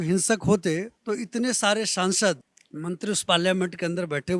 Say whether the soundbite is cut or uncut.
cut